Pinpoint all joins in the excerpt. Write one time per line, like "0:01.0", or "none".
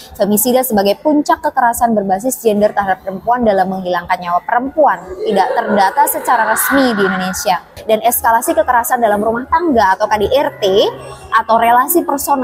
0:07.7